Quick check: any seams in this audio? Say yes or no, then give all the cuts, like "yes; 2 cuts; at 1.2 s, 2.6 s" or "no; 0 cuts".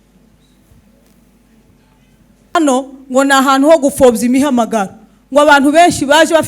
yes; 1 cut; at 2.5 s